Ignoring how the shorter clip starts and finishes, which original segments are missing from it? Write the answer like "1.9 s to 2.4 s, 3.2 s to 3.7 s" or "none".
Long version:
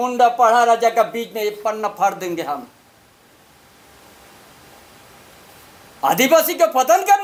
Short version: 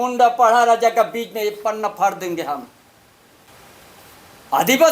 3.5 s to 5.0 s